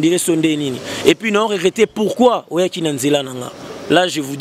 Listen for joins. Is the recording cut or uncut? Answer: uncut